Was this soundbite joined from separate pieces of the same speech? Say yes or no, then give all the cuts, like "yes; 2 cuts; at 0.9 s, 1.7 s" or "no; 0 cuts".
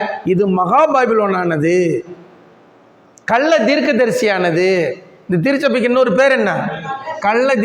no; 0 cuts